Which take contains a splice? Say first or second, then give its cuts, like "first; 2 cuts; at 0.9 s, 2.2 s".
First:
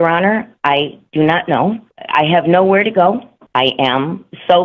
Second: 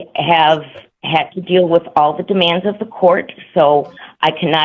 first; 2 cuts; at 1.9 s, 3.3 s